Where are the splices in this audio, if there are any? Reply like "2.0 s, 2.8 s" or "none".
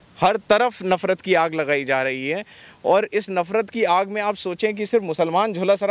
none

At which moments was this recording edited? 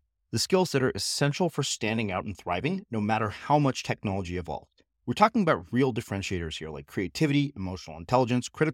none

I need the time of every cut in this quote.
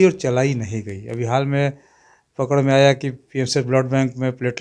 none

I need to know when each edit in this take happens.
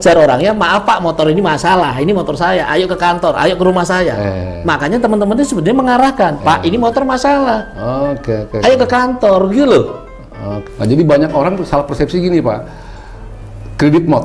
none

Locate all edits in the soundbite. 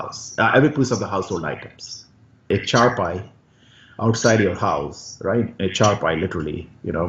2.5 s

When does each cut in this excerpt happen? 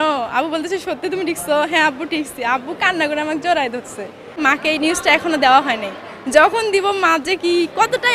4.4 s

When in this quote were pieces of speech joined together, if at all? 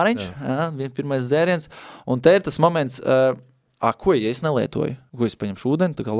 5.0 s

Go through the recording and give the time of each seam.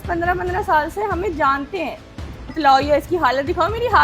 2.5 s

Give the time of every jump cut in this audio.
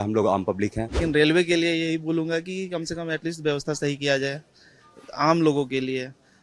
1.0 s

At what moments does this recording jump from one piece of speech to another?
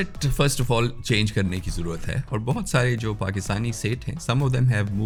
none

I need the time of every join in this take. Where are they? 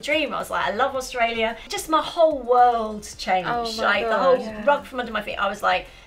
1.7 s

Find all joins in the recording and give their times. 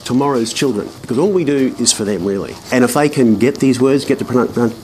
2.7 s

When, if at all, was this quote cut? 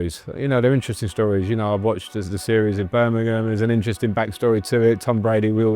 none

